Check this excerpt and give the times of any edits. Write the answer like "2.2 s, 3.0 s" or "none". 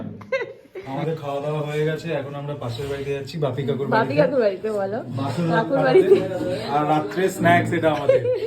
1.0 s